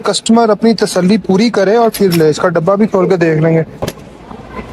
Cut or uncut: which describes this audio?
cut